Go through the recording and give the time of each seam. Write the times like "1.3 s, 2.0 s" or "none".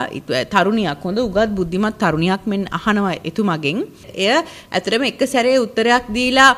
4.1 s